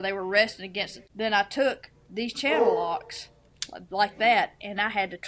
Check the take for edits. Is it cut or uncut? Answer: cut